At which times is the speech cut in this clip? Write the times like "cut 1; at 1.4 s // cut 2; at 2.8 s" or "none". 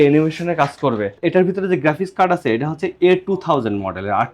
cut 1; at 1.0 s